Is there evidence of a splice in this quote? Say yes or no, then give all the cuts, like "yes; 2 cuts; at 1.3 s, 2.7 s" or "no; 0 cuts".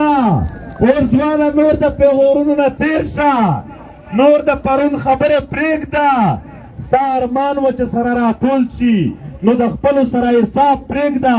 no; 0 cuts